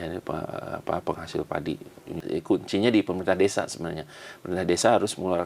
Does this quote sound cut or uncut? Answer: cut